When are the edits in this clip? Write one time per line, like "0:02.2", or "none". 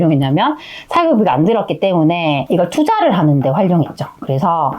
0:02.4

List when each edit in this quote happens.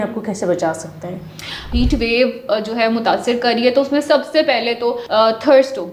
0:01.6
0:05.0

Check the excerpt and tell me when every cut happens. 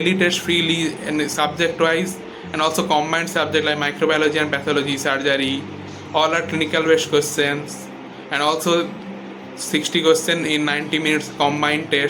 none

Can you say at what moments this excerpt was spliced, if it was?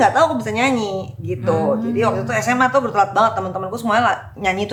none

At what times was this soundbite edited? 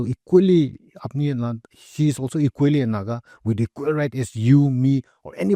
none

